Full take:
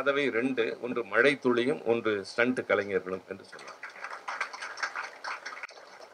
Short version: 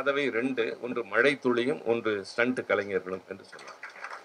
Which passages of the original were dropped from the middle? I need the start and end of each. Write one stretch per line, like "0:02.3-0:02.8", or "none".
none